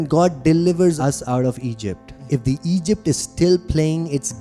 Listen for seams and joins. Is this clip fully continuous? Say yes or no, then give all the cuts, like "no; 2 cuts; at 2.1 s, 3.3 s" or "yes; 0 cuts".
no; 2 cuts; at 1.0 s, 2.1 s